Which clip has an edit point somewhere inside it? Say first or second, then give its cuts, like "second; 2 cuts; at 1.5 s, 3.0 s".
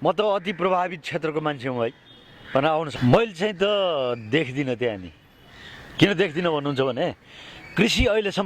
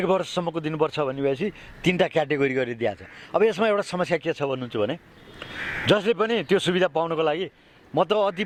first; 1 cut; at 2.9 s